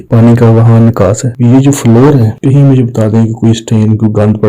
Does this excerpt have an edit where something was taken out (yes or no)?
yes